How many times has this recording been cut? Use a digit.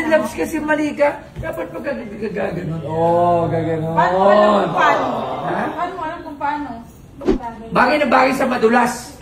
1